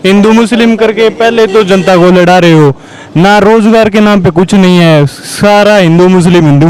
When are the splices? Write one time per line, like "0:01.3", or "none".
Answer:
none

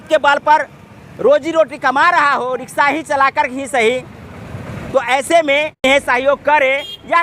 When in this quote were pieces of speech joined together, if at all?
0:05.8

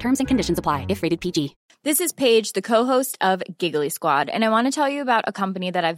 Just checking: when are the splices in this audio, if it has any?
0:01.6

